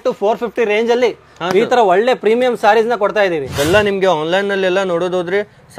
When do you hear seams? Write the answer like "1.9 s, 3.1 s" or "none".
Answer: 3.5 s